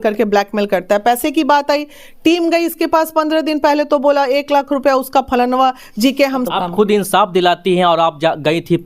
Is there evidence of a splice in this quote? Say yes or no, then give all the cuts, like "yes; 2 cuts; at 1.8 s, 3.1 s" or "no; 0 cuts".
yes; 1 cut; at 6.4 s